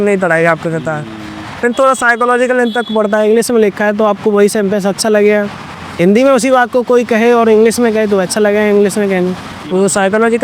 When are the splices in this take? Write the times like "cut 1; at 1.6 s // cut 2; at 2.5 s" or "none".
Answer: none